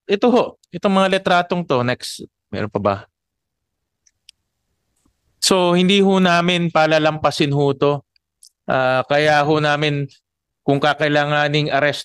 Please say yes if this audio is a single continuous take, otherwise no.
yes